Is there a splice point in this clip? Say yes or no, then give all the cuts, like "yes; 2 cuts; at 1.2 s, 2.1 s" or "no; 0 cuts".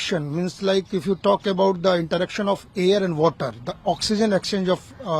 no; 0 cuts